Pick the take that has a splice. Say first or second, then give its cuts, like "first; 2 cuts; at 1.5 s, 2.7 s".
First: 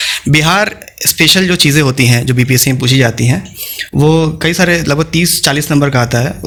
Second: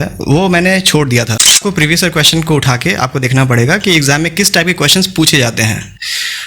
second; 1 cut; at 1.6 s